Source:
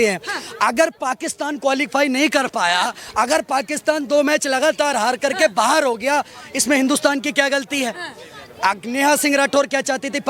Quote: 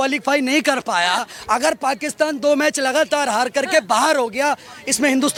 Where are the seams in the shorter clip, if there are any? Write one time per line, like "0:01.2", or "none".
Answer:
none